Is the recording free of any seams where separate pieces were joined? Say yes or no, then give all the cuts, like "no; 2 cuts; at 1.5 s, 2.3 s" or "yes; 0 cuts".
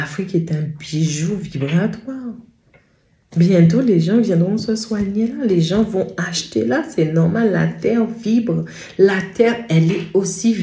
yes; 0 cuts